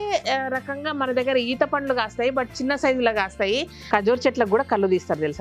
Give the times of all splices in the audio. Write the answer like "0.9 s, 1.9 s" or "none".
3.7 s